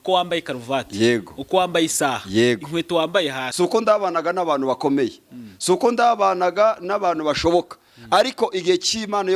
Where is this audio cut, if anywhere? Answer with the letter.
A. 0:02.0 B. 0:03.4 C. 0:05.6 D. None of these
B